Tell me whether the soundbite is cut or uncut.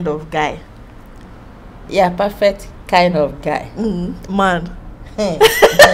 uncut